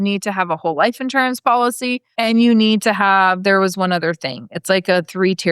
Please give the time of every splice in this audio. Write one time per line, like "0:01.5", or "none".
0:02.1